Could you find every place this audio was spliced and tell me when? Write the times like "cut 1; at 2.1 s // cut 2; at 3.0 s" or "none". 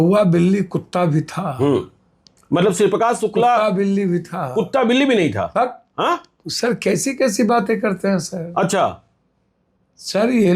none